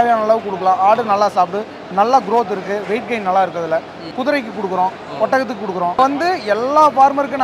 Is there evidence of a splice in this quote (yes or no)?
yes